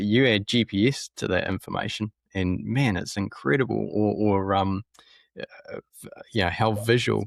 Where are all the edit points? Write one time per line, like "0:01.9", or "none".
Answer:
none